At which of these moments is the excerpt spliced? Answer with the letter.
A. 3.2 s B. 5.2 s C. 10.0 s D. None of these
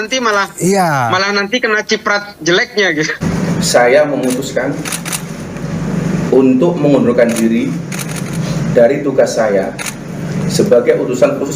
A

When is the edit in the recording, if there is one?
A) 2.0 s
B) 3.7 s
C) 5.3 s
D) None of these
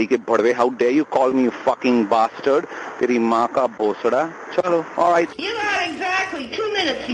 C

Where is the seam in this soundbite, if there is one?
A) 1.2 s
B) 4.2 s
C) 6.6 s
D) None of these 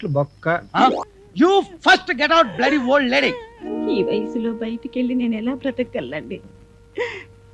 A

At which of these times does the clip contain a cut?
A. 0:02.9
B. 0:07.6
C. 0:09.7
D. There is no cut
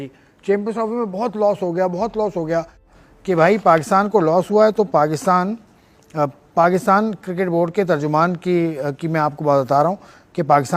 A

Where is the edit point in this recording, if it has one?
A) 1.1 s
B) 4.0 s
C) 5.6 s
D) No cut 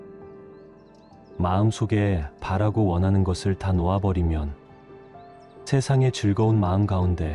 A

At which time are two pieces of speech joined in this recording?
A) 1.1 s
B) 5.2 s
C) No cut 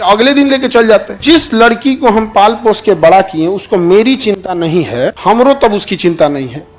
A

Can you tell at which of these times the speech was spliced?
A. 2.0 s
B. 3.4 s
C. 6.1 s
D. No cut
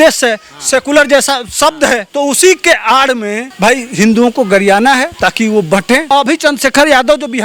C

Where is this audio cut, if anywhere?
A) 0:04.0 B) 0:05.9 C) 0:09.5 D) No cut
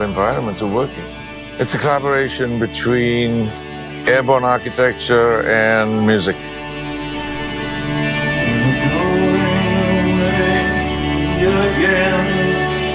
B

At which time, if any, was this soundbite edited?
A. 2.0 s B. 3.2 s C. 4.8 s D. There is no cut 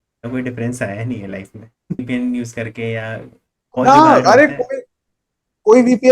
A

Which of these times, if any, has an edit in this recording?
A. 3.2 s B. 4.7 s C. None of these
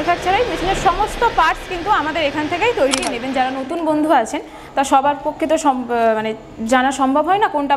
A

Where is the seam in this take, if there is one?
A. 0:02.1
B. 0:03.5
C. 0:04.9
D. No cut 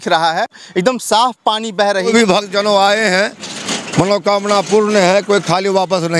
A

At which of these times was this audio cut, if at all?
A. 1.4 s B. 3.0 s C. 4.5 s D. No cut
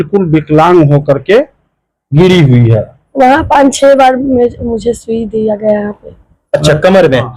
B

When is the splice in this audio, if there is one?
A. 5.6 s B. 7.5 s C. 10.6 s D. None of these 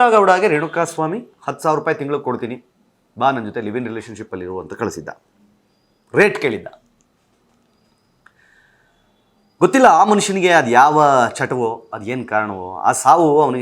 D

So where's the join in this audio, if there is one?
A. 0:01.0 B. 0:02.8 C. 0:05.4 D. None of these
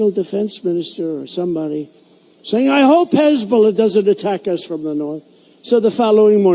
D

